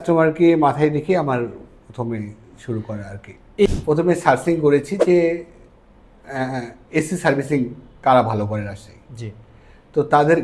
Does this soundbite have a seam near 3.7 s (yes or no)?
yes